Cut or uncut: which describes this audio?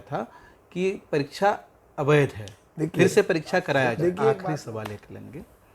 cut